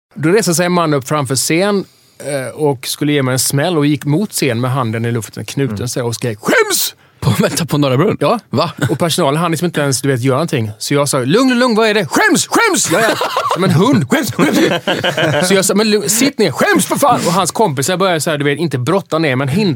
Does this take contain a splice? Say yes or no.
no